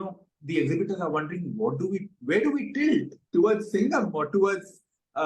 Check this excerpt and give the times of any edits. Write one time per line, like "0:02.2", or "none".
0:03.2

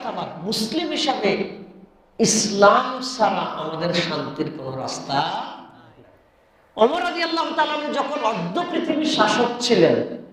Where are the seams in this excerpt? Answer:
0:06.8

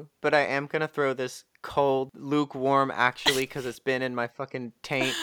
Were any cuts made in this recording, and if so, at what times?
0:02.2

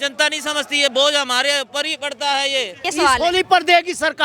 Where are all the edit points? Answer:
0:02.8

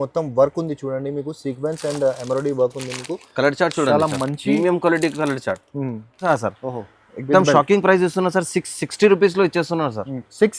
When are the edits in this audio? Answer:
0:06.3

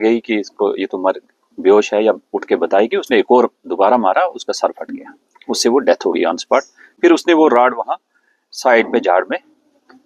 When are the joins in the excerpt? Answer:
none

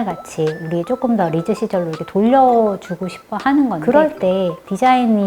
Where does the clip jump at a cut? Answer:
0:03.8

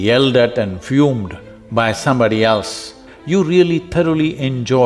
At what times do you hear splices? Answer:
0:03.0

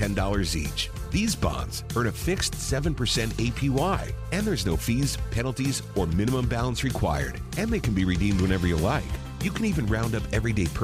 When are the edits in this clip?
none

